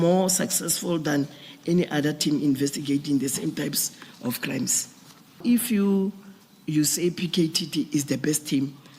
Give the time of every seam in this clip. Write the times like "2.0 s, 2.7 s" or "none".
5.4 s